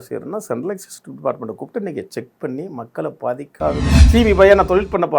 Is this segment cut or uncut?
cut